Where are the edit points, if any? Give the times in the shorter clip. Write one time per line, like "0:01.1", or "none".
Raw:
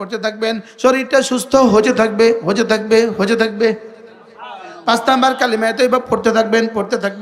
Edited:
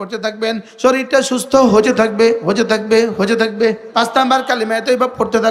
0:03.8